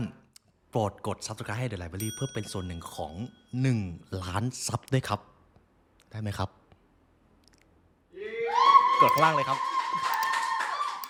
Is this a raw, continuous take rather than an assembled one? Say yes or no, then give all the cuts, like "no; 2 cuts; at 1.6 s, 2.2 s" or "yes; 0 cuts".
yes; 0 cuts